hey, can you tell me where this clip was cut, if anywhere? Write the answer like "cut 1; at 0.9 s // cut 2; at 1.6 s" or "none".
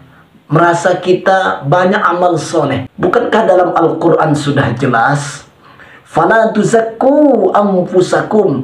cut 1; at 2.9 s